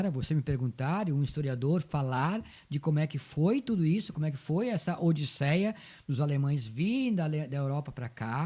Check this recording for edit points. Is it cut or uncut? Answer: uncut